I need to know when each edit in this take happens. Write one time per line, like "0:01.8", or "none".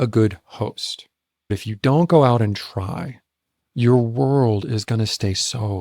0:01.5